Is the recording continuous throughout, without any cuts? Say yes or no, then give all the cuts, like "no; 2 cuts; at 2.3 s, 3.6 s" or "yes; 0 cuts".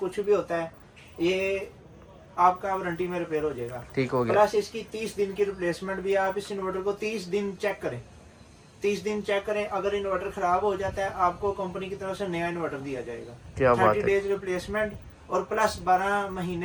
yes; 0 cuts